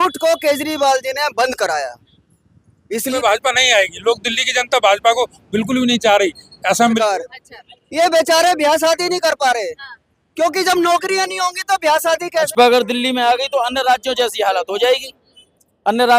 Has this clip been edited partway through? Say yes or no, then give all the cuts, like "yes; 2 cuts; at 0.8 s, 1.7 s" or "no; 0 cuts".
yes; 3 cuts; at 3.1 s, 6.8 s, 12.5 s